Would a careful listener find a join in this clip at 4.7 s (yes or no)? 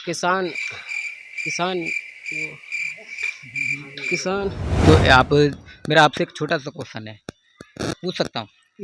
yes